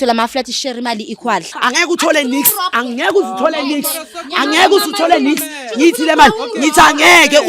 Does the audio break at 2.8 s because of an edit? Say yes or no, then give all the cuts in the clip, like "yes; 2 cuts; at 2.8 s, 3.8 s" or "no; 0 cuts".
yes; 2 cuts; at 1.5 s, 2.8 s